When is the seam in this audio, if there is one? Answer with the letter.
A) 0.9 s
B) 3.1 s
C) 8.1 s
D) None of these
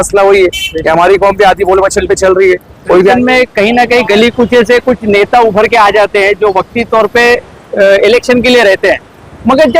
B